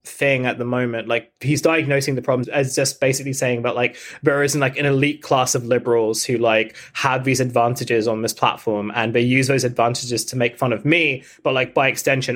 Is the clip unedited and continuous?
no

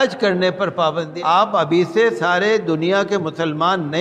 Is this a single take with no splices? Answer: no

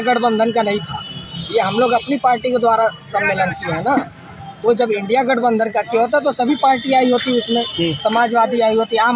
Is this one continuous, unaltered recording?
yes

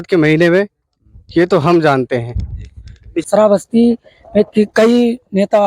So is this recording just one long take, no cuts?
no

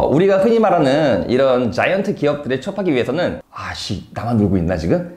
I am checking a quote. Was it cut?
yes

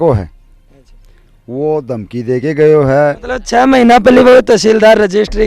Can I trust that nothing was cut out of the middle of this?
no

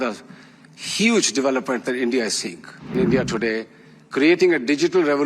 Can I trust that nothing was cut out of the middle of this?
no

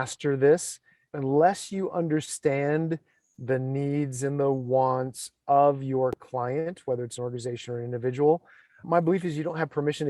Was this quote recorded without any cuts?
no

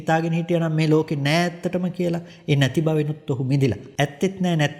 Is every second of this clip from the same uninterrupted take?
no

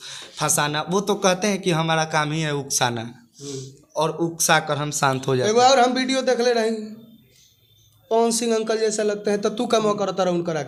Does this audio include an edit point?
no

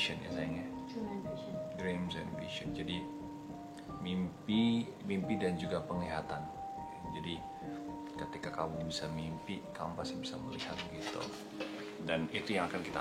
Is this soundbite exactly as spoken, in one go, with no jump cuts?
no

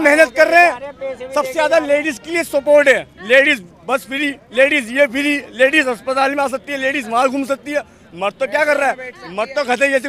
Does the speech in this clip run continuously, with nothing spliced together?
yes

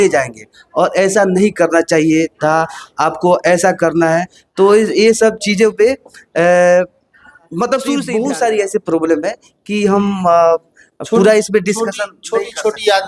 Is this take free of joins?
no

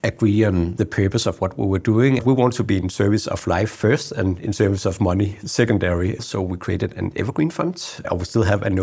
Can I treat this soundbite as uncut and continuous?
no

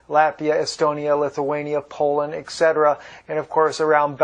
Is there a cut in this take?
yes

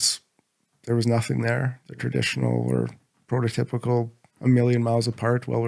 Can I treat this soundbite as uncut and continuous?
no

